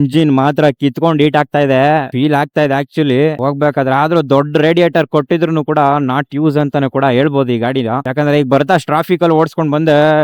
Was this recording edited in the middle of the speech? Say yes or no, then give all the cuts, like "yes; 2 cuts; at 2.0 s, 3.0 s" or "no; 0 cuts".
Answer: no; 0 cuts